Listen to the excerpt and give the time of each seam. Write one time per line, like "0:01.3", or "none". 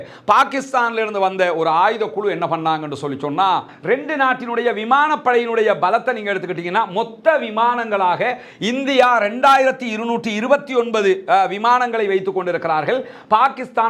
0:03.7